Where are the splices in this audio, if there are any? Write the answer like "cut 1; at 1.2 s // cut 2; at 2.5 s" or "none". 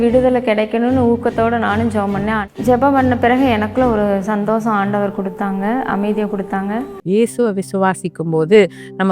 cut 1; at 2.4 s // cut 2; at 7.0 s